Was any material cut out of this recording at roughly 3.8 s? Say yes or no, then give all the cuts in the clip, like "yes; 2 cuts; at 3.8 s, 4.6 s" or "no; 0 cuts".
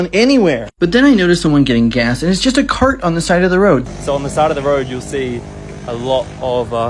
yes; 1 cut; at 3.8 s